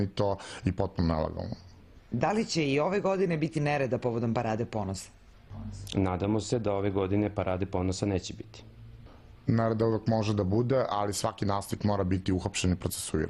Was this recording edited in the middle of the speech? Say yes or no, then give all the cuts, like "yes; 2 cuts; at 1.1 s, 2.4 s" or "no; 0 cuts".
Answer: no; 0 cuts